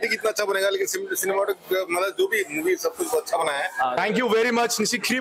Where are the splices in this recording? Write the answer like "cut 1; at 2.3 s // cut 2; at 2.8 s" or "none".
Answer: cut 1; at 4.0 s